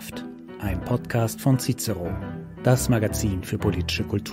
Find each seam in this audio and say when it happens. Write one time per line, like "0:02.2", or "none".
none